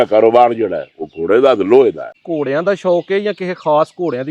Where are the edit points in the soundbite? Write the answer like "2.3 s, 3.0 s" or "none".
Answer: 2.0 s

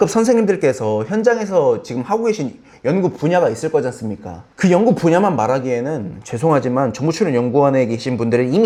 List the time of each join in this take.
none

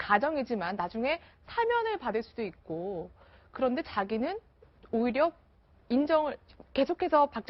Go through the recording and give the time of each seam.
1.5 s

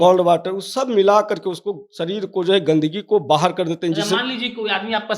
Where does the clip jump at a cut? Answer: none

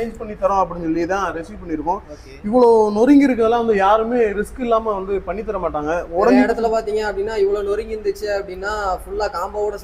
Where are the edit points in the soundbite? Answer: none

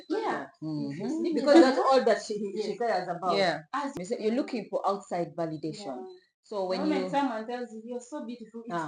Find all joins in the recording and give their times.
3.9 s

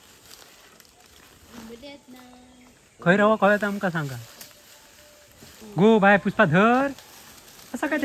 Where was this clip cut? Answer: 5.6 s

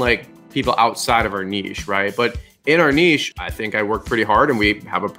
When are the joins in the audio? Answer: 3.5 s

